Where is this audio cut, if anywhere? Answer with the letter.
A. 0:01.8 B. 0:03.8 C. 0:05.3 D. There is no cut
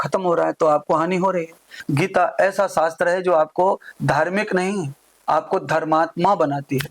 A